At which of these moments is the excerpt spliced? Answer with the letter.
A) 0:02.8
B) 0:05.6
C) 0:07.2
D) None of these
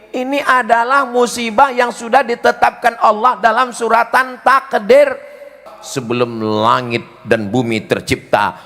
B